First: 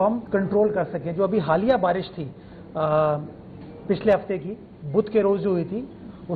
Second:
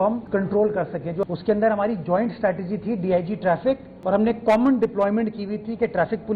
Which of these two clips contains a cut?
second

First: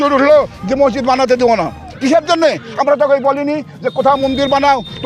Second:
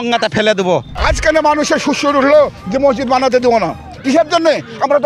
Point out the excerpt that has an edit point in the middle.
second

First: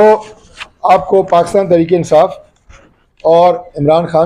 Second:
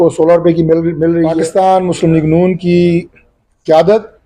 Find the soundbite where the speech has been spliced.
second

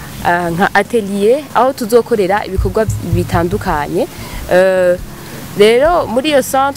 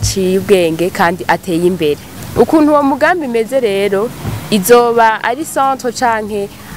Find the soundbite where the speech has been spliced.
second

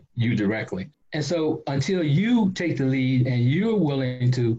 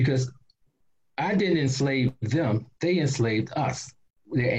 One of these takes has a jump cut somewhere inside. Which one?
first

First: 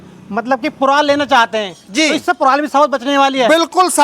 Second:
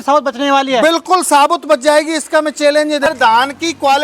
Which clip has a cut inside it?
second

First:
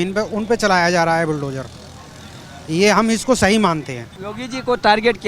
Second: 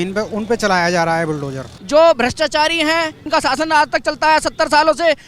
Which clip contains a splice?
second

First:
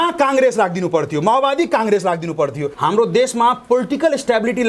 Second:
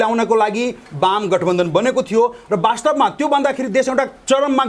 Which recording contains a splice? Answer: first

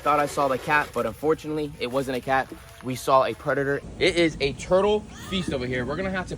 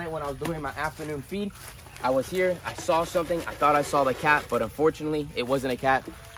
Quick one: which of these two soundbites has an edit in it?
first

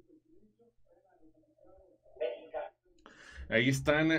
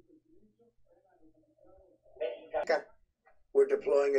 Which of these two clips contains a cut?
second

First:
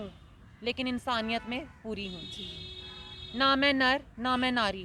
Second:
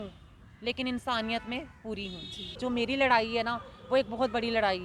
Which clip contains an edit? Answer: second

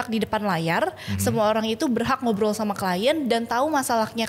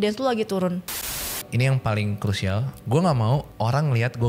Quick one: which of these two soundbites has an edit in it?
second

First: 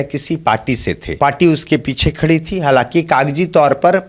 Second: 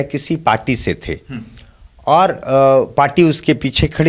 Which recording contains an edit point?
first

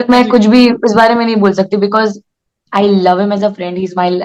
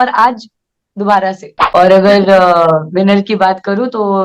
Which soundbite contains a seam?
second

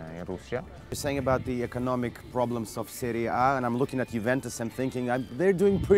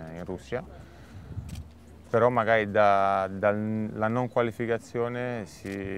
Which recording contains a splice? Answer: first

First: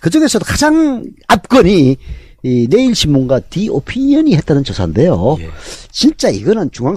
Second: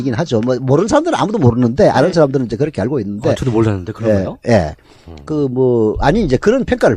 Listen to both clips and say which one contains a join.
second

